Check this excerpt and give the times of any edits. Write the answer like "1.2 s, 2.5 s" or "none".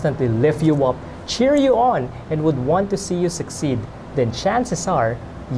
none